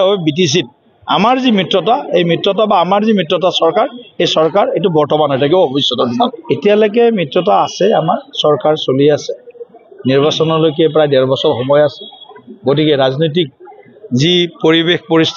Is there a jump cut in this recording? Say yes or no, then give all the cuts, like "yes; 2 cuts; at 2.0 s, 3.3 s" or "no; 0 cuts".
yes; 1 cut; at 6.3 s